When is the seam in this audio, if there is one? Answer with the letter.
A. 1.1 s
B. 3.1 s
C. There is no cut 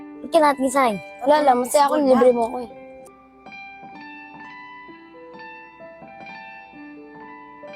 B